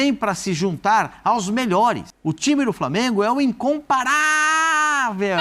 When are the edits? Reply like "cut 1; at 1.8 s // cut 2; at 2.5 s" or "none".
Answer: cut 1; at 2.1 s